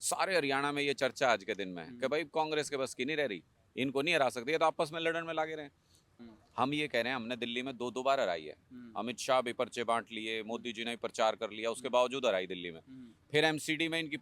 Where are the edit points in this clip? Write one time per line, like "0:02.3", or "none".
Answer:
0:06.0